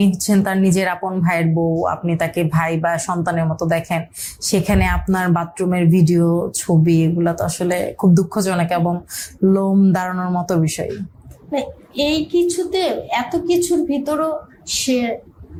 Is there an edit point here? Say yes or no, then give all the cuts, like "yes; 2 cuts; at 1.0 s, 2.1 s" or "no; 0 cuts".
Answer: no; 0 cuts